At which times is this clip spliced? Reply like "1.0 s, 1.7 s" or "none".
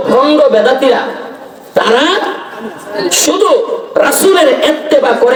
none